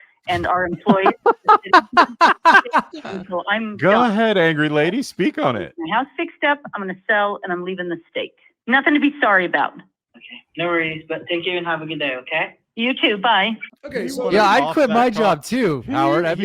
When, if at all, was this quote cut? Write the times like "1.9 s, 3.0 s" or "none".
8.5 s, 13.7 s